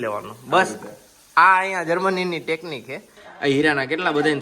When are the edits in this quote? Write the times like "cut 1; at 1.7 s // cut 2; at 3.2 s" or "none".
cut 1; at 3.0 s